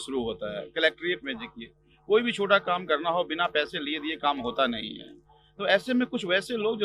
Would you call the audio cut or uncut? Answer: uncut